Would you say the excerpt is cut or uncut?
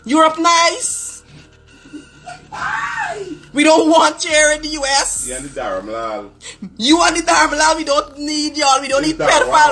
uncut